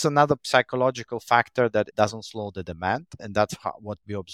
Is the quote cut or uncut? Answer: uncut